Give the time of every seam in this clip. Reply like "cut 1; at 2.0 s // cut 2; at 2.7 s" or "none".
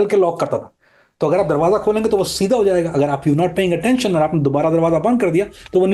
none